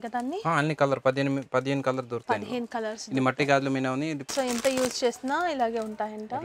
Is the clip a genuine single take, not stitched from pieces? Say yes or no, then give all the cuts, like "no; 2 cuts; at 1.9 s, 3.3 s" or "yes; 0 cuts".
no; 1 cut; at 4.2 s